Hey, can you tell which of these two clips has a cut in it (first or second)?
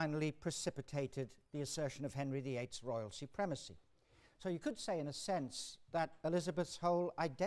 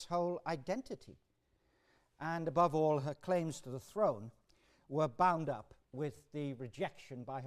second